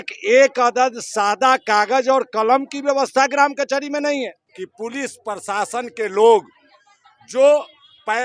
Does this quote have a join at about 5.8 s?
no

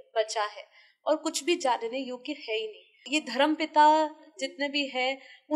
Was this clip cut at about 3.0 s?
yes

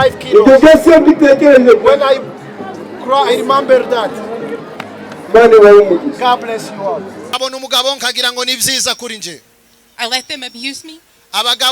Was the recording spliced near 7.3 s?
yes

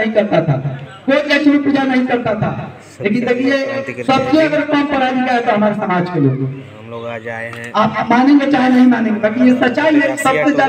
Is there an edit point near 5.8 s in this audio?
no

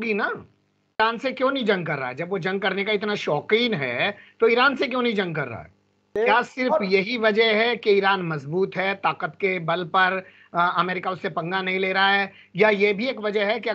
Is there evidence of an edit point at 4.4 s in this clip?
no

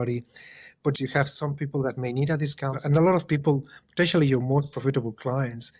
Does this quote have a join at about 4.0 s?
no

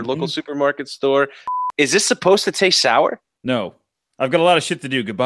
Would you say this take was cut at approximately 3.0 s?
no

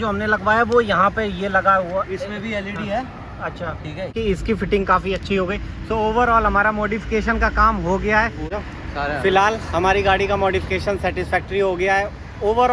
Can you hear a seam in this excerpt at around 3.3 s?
no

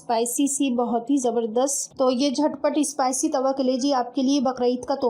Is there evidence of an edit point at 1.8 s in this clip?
yes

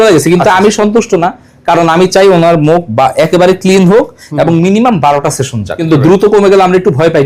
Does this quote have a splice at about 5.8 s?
yes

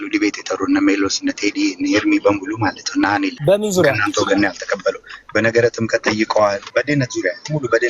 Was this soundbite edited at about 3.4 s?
yes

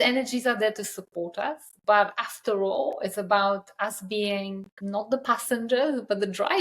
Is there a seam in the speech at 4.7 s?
yes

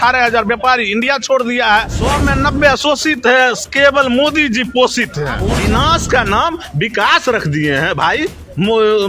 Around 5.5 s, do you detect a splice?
yes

